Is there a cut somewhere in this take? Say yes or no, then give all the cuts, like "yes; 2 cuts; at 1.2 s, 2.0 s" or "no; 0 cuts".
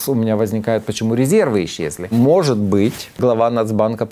yes; 2 cuts; at 2.1 s, 3.2 s